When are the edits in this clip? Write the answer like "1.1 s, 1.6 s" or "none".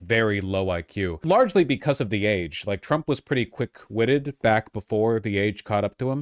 1.2 s